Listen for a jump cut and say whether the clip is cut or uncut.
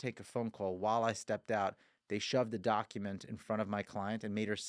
uncut